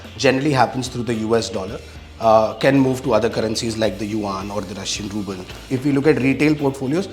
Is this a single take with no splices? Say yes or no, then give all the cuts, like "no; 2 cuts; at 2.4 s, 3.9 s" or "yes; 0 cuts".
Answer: no; 1 cut; at 5.6 s